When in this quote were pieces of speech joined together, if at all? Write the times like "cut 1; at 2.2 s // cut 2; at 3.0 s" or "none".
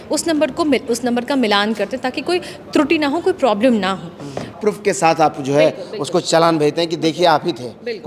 cut 1; at 4.5 s